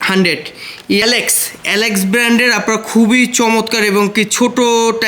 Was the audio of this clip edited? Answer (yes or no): yes